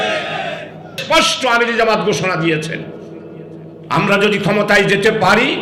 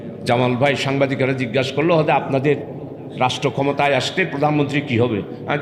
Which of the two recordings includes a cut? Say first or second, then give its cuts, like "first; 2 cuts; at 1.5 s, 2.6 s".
first; 1 cut; at 1.0 s